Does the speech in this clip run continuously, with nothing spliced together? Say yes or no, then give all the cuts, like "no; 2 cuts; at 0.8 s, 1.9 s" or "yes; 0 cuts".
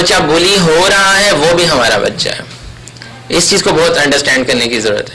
yes; 0 cuts